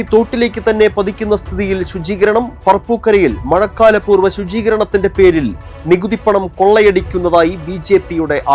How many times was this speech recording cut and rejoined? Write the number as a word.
zero